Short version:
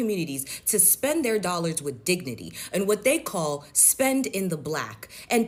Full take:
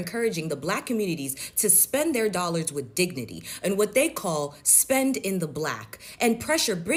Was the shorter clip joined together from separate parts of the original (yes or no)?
no